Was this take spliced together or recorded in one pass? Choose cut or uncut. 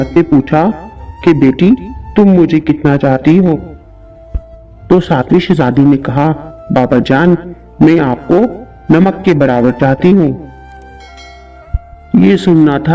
uncut